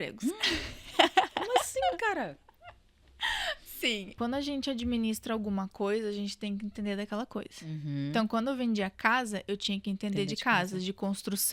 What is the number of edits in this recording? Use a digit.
1